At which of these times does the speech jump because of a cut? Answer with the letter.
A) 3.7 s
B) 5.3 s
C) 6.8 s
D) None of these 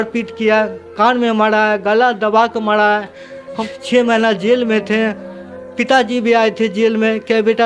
A